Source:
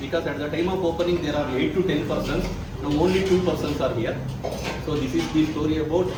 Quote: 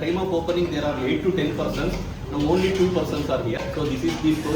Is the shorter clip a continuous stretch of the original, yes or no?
no